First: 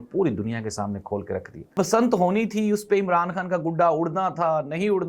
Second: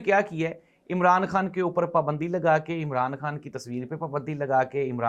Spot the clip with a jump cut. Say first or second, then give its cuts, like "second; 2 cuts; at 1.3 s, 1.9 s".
first; 1 cut; at 1.8 s